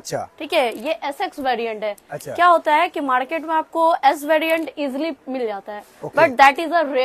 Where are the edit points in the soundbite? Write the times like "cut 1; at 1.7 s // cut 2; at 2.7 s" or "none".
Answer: none